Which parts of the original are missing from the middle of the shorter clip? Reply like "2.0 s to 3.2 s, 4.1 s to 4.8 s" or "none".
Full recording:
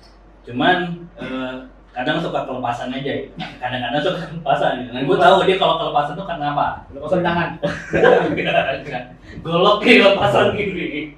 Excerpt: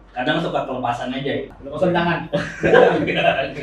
3.4 s to 6.9 s